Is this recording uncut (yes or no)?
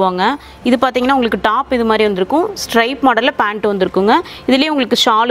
yes